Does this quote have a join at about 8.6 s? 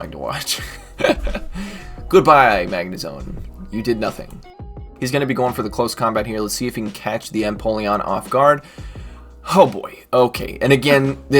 no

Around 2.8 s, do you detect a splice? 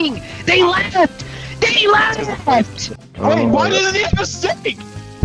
yes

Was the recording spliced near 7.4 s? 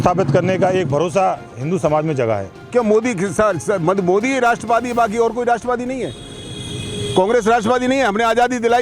no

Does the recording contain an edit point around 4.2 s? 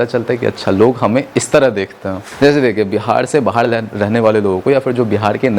no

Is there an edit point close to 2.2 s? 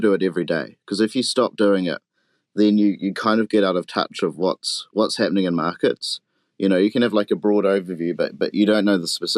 no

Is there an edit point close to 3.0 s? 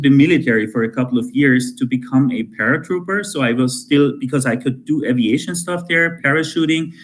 no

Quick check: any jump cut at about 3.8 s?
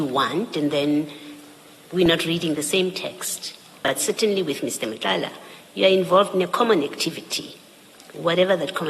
yes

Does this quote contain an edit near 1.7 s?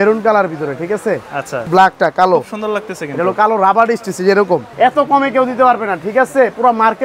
yes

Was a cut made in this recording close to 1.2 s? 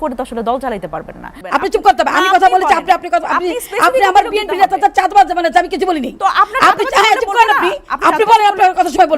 yes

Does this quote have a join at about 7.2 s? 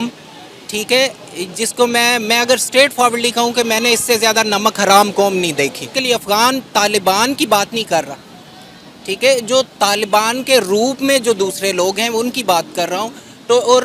no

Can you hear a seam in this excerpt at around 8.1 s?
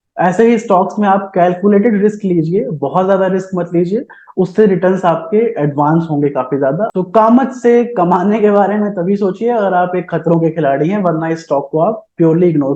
no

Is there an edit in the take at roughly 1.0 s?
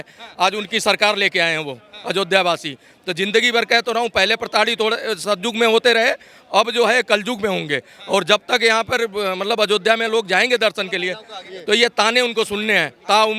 no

